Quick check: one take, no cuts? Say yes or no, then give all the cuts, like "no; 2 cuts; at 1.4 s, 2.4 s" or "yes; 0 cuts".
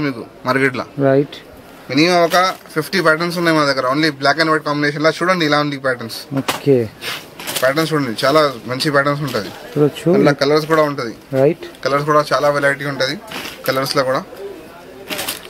yes; 0 cuts